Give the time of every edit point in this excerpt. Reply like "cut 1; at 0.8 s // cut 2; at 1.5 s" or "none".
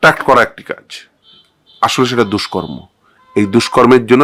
none